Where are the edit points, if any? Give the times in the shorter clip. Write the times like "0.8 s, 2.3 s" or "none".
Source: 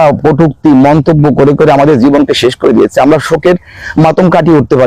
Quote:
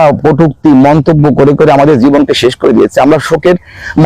none